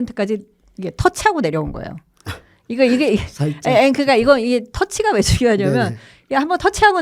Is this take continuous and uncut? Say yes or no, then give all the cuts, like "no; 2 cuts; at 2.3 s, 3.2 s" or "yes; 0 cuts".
yes; 0 cuts